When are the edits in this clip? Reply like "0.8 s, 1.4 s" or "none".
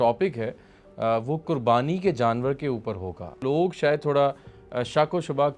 3.4 s